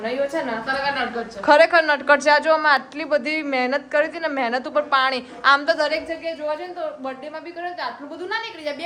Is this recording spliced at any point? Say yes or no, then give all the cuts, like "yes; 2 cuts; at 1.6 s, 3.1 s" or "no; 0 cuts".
no; 0 cuts